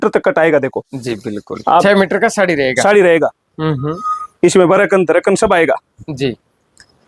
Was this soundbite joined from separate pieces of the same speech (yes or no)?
yes